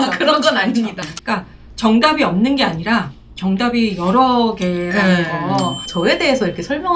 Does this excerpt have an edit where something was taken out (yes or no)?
yes